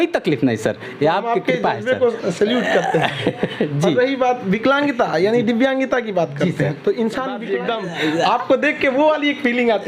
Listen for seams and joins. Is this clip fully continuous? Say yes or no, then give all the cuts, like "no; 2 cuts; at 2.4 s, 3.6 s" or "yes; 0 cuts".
no; 1 cut; at 7.4 s